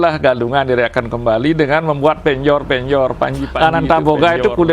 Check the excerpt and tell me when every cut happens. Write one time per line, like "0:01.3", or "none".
0:03.4